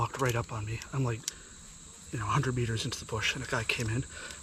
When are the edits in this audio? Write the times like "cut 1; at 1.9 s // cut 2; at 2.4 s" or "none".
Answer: none